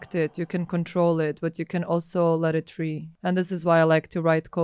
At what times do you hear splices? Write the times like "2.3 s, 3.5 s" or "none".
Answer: 3.1 s